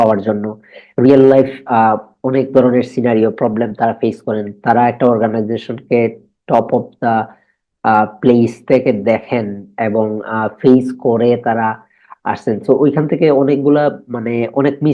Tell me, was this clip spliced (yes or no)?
no